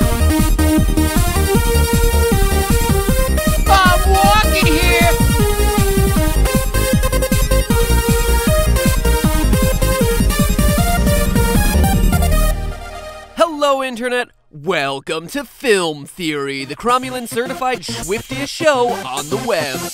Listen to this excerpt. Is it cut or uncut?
cut